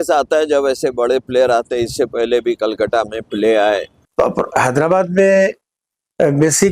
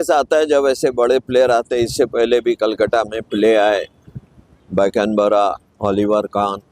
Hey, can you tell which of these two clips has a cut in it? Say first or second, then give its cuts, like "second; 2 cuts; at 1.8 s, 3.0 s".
first; 1 cut; at 4.0 s